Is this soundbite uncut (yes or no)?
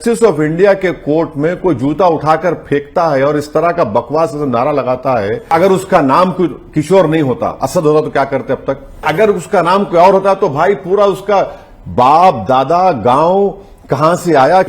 no